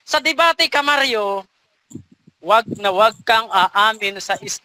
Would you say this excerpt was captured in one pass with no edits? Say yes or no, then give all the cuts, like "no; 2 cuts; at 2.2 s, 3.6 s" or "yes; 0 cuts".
yes; 0 cuts